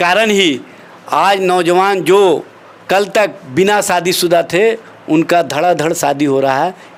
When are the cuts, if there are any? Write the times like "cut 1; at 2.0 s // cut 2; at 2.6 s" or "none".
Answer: none